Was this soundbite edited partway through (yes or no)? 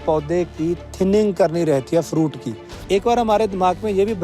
yes